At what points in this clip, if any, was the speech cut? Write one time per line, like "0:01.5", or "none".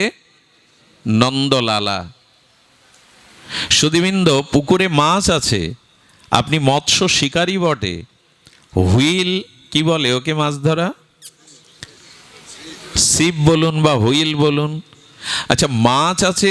none